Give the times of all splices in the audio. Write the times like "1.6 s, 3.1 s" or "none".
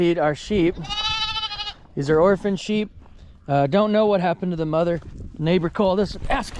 none